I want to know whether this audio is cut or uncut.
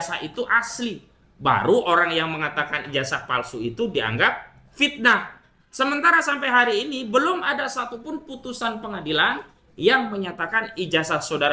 uncut